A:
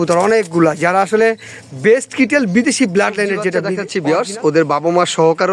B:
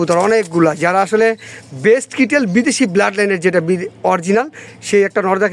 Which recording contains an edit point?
A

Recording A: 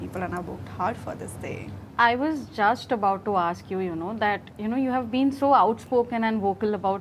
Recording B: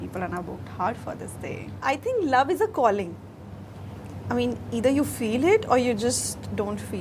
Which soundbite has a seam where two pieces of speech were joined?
B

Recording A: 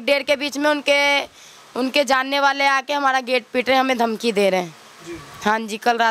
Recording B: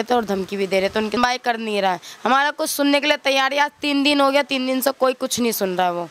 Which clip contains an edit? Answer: B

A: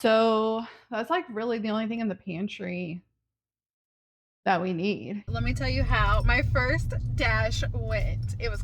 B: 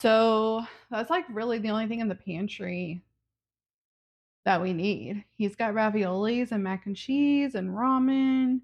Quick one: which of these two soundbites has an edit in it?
A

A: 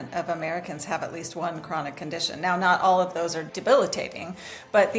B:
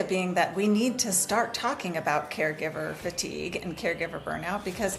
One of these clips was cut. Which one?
A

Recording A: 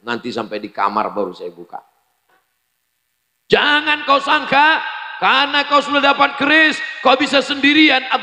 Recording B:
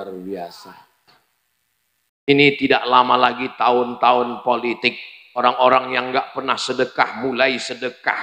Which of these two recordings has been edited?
B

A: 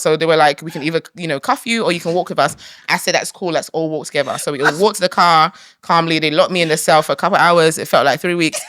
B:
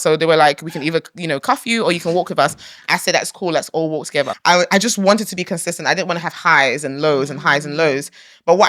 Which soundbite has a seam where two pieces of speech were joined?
B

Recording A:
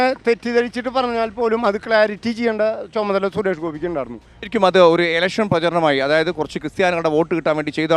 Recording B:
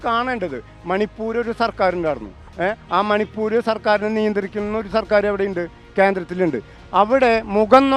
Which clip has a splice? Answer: A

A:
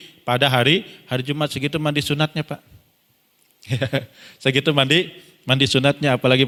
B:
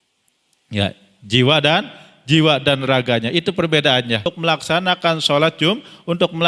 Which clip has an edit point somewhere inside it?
B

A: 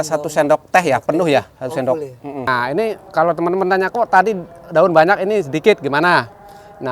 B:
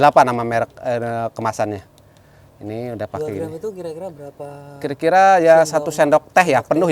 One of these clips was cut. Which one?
A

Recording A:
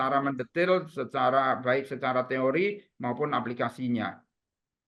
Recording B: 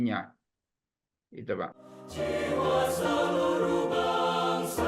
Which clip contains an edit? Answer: B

